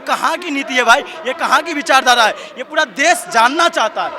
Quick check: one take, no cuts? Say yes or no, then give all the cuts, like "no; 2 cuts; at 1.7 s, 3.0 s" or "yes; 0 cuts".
yes; 0 cuts